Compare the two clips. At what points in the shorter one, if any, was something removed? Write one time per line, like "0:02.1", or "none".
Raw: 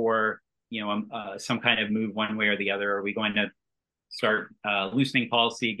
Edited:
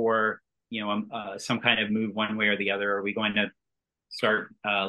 none